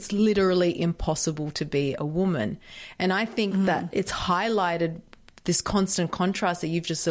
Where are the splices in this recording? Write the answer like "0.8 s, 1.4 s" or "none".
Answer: none